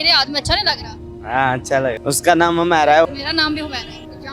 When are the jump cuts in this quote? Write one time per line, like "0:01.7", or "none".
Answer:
0:02.0
0:03.1